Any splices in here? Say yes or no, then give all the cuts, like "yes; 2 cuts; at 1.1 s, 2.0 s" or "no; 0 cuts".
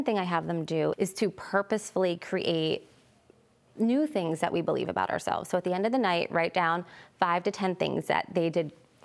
yes; 1 cut; at 0.9 s